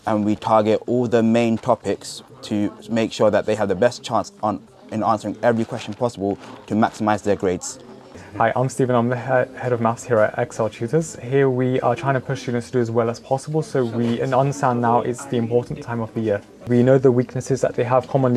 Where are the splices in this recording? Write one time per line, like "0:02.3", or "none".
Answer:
none